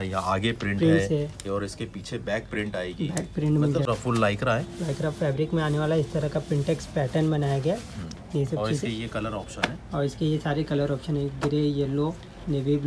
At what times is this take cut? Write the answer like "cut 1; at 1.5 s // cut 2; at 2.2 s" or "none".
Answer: cut 1; at 3.9 s